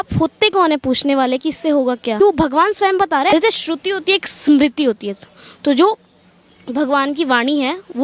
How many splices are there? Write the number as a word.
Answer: two